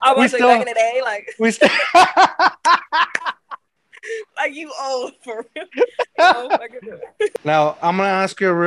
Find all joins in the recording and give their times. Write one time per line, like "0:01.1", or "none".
0:07.4